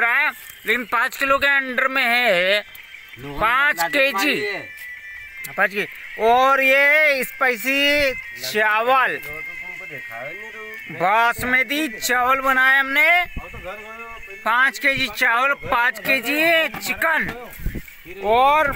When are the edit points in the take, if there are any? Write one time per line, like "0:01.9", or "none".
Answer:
none